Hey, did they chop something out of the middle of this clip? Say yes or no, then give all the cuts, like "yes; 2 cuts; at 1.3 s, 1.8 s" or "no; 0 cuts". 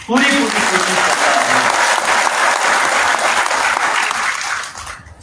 no; 0 cuts